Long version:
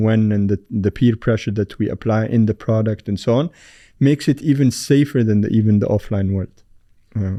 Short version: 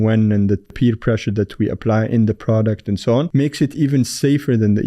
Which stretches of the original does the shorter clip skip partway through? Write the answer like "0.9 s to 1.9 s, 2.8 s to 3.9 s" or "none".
0.7 s to 0.9 s, 3.5 s to 4.0 s